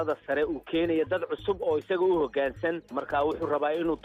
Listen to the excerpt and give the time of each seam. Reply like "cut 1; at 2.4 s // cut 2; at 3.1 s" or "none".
cut 1; at 3.0 s